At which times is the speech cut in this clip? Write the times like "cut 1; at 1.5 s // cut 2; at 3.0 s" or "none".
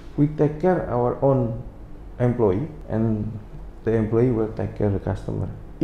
cut 1; at 2.8 s